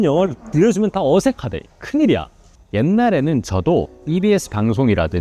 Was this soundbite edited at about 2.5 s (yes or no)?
yes